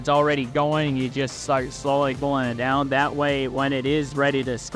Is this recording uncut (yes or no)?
yes